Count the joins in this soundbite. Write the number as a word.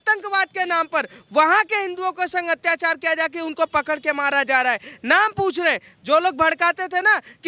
zero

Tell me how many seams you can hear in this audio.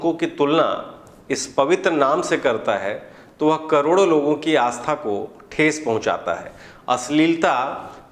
zero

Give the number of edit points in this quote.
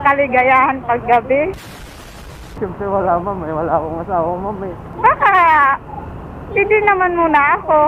two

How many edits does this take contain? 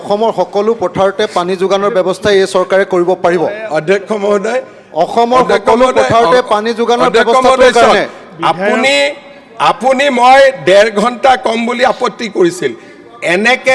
zero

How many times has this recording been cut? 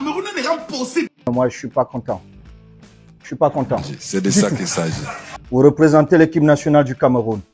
one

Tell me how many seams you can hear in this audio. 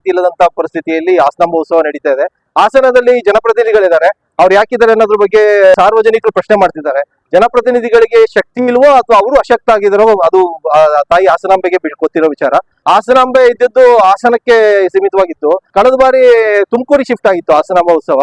five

